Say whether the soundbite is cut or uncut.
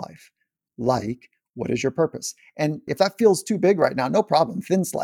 cut